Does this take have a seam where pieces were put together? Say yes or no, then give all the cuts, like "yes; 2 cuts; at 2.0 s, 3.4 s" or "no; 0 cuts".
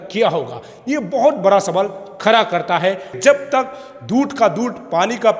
yes; 1 cut; at 3.1 s